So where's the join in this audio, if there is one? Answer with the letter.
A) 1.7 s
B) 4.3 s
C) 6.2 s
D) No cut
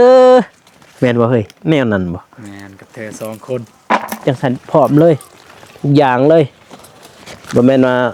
B